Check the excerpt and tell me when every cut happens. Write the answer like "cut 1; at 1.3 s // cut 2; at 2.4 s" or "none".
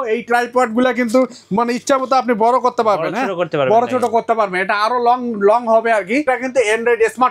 cut 1; at 6.3 s